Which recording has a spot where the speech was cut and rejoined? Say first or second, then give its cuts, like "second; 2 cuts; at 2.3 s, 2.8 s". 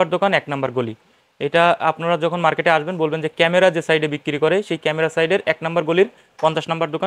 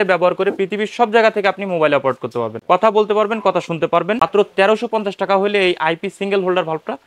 second; 2 cuts; at 2.5 s, 4.2 s